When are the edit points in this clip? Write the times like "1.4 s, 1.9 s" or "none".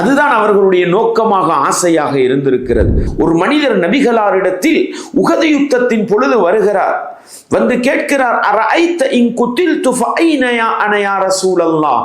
3.0 s